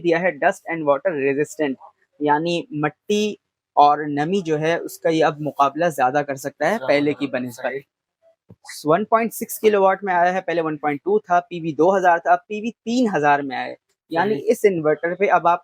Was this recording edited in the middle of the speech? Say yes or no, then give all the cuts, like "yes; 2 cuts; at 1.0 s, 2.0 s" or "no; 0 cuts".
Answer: no; 0 cuts